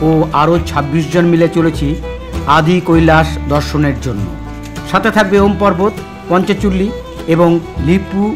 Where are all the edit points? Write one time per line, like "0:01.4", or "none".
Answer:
none